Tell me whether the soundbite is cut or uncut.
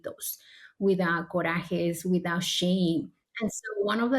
cut